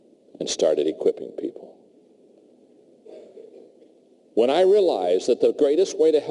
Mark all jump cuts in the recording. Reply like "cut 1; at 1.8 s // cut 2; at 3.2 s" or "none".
cut 1; at 1.0 s